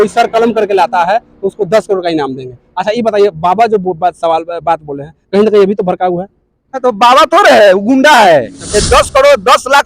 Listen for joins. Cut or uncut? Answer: cut